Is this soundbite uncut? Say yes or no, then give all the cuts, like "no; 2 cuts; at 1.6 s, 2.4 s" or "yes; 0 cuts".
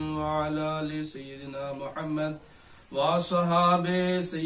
yes; 0 cuts